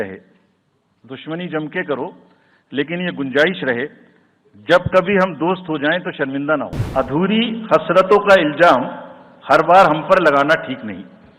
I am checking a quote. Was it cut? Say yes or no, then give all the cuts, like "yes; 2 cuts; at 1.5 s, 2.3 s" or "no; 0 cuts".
yes; 1 cut; at 6.8 s